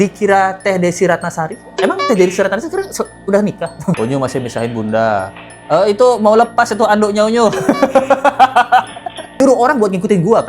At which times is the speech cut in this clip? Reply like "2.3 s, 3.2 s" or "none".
3.9 s, 9.3 s